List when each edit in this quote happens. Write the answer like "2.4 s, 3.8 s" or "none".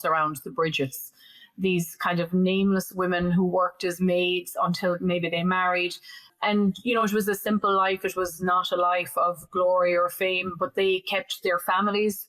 6.3 s